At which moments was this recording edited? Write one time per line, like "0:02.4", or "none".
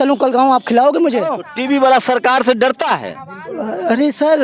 0:01.5